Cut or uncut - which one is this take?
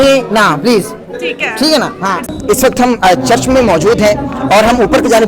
cut